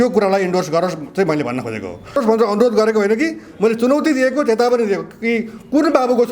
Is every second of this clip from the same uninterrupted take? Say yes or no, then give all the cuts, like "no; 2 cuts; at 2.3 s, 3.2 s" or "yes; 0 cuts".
no; 1 cut; at 2.2 s